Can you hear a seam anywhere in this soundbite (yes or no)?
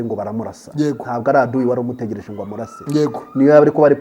no